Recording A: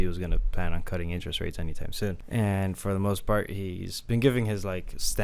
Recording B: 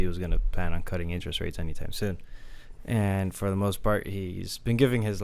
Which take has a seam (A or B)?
A